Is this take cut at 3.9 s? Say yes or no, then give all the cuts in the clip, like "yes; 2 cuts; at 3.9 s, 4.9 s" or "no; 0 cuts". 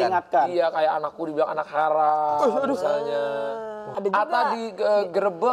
yes; 1 cut; at 3.9 s